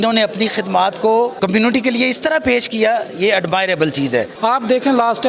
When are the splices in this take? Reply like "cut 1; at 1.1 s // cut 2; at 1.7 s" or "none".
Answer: cut 1; at 1.3 s // cut 2; at 4.3 s